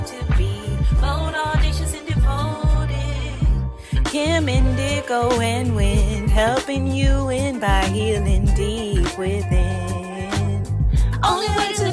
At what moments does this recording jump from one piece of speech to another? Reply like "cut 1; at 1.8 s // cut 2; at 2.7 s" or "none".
none